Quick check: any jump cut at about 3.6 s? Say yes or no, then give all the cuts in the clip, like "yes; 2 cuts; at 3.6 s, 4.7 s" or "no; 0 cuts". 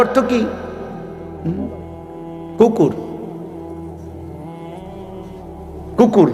no; 0 cuts